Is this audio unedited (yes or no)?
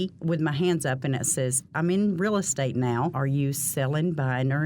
no